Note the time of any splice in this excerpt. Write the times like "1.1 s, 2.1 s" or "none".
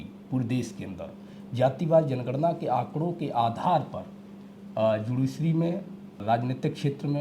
6.2 s